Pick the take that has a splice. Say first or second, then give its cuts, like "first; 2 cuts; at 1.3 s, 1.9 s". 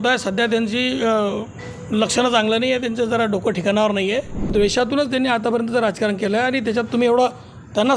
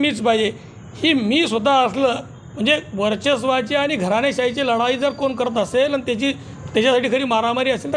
first; 1 cut; at 4.5 s